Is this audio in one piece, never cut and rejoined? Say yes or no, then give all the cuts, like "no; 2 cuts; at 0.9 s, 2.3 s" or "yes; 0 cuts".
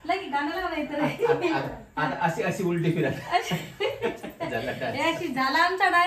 yes; 0 cuts